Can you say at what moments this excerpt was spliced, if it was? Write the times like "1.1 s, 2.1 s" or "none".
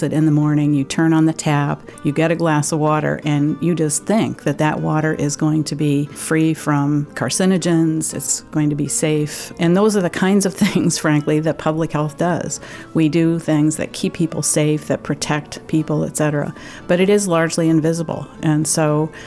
6.2 s, 7.2 s, 8.2 s, 9.5 s